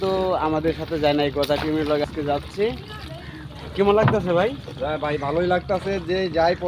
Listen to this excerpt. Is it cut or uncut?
uncut